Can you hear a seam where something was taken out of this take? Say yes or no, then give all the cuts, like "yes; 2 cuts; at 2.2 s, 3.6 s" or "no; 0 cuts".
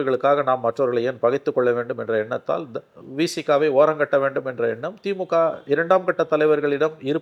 no; 0 cuts